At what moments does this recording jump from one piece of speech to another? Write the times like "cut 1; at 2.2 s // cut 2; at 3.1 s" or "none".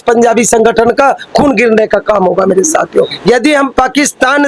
cut 1; at 3.1 s